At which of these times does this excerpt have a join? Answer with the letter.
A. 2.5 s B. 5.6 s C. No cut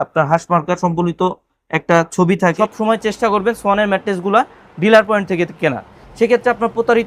A